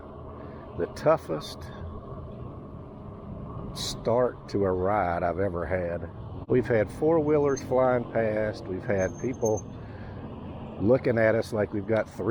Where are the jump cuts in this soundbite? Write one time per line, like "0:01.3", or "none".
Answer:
0:06.3